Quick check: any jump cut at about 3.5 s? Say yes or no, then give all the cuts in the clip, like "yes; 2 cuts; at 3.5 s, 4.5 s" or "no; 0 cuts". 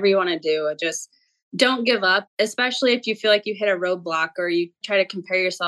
no; 2 cuts; at 2.2 s, 4.8 s